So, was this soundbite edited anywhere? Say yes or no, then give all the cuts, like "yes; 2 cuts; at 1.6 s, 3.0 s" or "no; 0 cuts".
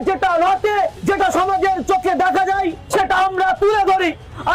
yes; 2 cuts; at 1.0 s, 2.8 s